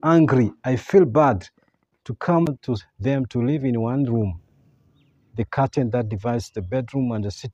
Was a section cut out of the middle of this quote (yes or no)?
yes